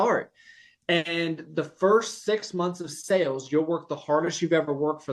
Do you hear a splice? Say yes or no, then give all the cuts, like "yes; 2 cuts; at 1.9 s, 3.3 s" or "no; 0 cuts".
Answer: no; 0 cuts